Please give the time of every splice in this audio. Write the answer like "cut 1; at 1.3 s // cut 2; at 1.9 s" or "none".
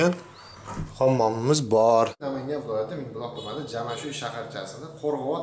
cut 1; at 2.3 s